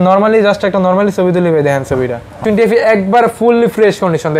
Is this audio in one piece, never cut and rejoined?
no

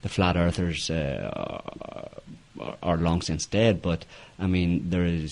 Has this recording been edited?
yes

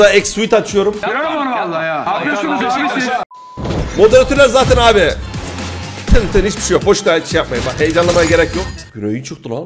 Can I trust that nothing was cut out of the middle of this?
no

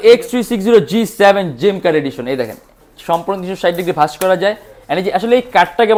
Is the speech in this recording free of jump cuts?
yes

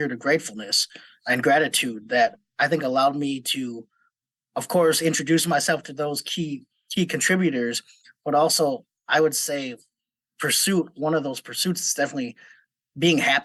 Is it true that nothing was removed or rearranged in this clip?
yes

